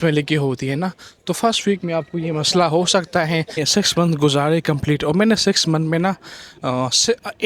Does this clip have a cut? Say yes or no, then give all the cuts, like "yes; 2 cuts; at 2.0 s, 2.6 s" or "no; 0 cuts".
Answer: yes; 1 cut; at 3.6 s